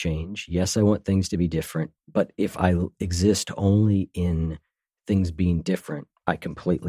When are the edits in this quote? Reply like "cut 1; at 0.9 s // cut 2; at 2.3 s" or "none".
none